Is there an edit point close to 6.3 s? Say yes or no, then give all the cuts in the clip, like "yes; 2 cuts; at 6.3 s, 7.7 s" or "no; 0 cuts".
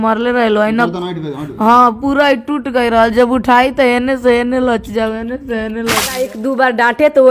yes; 1 cut; at 6.3 s